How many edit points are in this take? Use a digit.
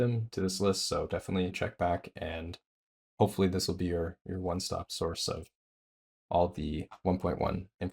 1